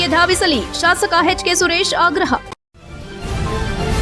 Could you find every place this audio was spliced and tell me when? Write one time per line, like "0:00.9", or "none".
0:02.5

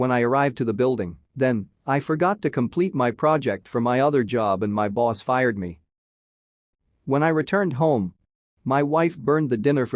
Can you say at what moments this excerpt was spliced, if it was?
0:01.2

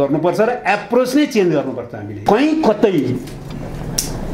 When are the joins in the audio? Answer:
0:02.2

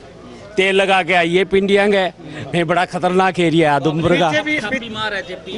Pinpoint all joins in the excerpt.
none

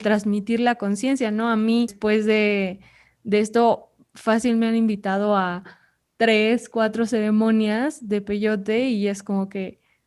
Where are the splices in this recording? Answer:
0:02.0

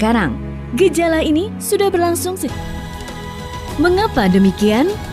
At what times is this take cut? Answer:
0:02.4

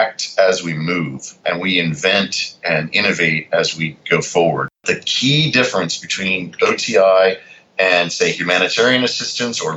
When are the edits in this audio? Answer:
0:01.2
0:04.8

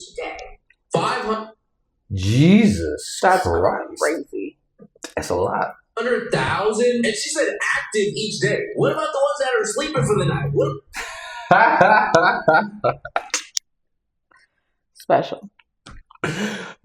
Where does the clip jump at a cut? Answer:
none

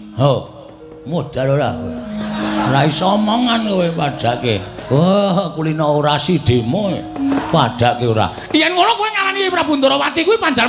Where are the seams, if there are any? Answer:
0:02.6
0:07.4

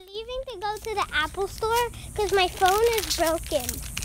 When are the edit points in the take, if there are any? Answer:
0:02.0

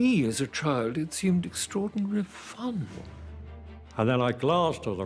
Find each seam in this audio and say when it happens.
0:02.9

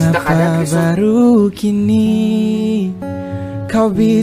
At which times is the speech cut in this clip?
none

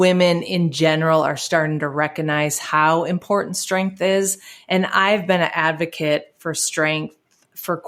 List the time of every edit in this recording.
none

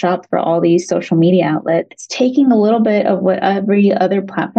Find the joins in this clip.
0:02.0

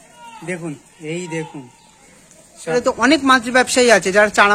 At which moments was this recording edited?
0:02.7

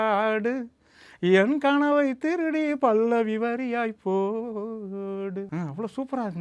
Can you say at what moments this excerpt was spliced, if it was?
0:05.5

